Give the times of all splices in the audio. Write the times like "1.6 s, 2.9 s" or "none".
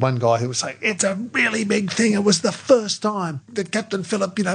1.0 s, 3.4 s